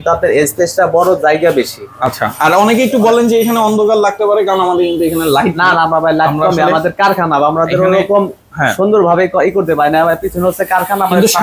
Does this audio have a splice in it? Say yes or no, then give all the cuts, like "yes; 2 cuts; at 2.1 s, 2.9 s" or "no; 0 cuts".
no; 0 cuts